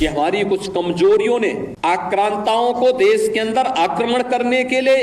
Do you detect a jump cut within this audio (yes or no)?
yes